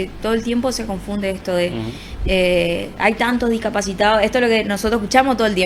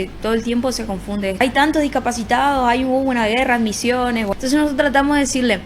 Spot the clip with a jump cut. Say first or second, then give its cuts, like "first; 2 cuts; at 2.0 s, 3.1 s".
second; 2 cuts; at 1.4 s, 4.3 s